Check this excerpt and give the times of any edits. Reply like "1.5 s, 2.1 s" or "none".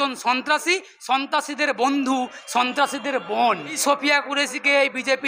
3.8 s